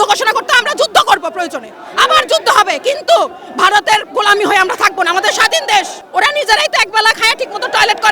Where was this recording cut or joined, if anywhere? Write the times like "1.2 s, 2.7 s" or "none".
6.0 s